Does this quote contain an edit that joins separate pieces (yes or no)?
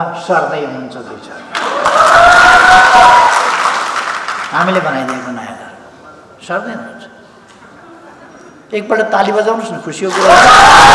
no